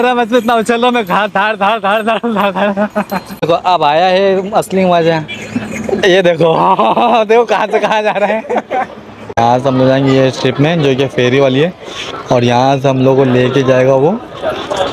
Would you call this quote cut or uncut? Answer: cut